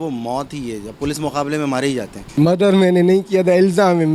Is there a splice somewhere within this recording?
yes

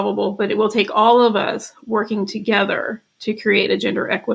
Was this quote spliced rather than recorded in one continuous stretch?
no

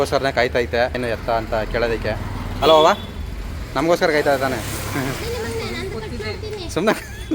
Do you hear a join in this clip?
yes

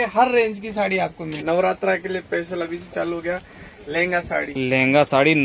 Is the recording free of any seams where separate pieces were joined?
no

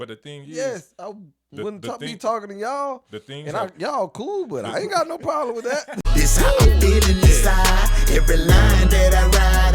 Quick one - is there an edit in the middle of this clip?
yes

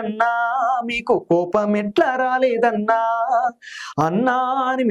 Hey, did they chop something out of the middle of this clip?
no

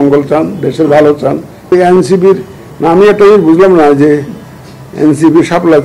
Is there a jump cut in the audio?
yes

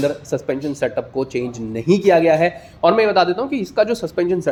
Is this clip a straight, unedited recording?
yes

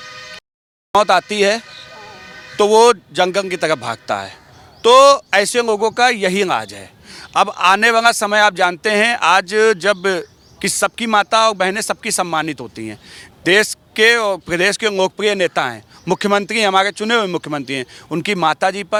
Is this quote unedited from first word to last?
yes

